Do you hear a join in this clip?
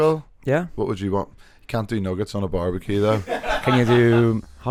no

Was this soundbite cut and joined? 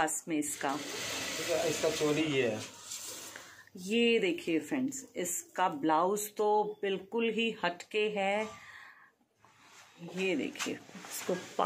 no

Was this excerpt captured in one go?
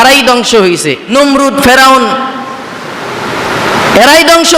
no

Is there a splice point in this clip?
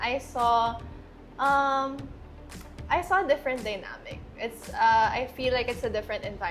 no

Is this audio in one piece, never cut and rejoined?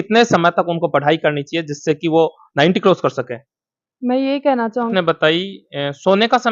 no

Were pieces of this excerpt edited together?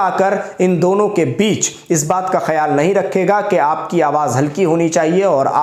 no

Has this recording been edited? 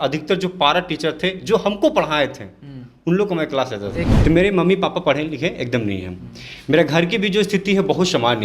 yes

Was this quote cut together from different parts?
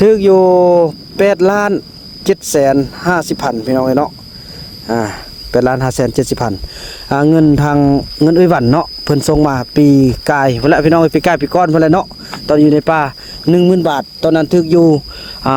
no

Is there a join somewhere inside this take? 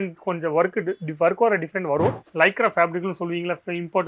yes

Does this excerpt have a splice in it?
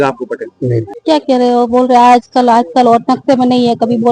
yes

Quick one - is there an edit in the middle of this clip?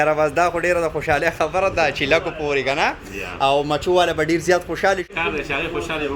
yes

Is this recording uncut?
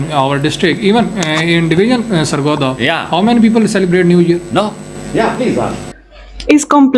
no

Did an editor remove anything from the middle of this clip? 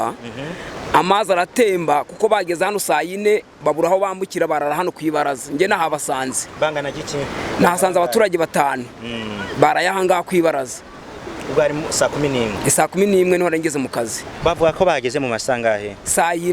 no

